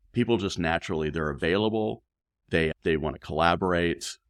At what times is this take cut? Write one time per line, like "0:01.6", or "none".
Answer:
none